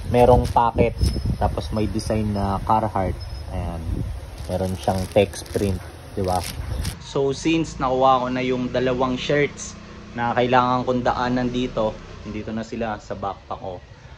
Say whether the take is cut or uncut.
uncut